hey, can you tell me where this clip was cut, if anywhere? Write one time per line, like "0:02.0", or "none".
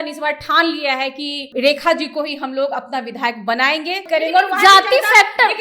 0:01.4
0:04.0

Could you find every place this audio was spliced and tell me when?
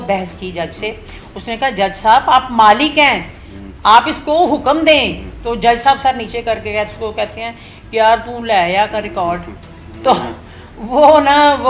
none

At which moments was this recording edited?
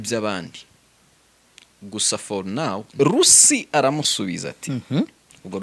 0:02.9

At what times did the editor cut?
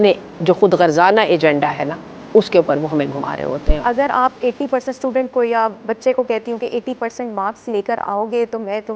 0:03.8

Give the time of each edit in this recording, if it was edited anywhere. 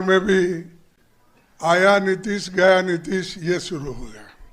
none

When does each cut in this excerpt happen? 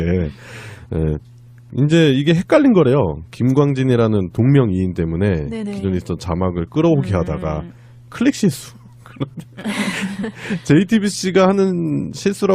0:11.4

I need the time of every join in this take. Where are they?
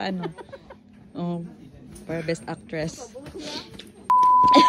none

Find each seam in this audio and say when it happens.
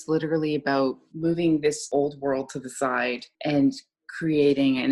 0:01.1
0:01.8
0:03.3

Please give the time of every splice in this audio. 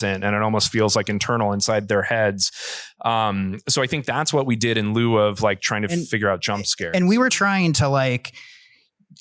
0:07.7

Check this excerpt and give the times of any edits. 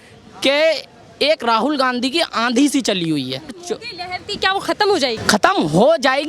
0:03.6
0:05.2

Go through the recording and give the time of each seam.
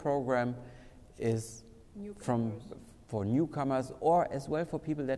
none

